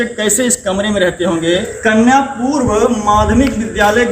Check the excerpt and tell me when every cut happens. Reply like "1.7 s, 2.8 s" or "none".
1.7 s